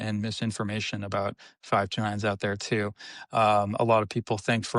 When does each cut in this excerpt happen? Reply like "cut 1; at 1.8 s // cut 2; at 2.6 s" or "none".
none